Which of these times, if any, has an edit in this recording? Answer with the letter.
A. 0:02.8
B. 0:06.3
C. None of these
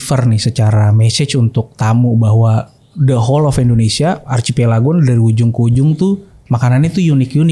C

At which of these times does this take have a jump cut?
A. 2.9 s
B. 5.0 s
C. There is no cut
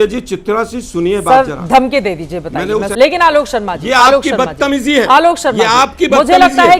A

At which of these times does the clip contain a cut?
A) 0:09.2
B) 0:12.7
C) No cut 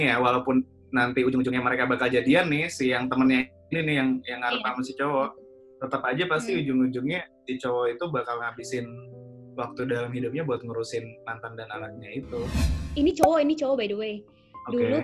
B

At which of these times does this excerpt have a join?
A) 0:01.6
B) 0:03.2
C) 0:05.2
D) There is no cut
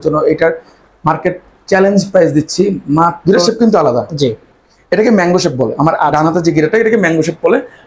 B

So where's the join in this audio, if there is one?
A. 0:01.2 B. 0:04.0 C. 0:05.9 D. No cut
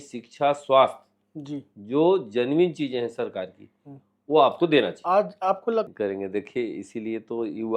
C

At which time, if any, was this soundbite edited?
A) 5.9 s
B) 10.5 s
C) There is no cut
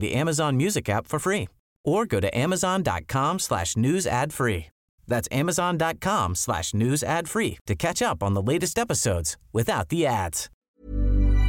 B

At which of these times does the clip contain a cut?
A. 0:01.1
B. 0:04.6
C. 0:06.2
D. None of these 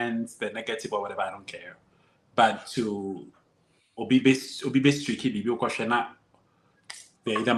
D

